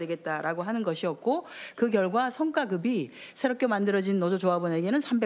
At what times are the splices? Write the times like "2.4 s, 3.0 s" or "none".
1.5 s